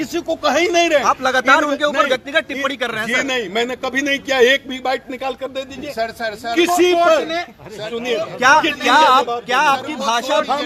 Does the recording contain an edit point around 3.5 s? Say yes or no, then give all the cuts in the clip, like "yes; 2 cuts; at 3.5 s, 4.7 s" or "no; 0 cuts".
no; 0 cuts